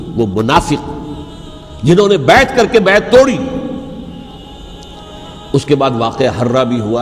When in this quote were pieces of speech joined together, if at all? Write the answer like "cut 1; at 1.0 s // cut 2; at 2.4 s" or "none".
cut 1; at 4.4 s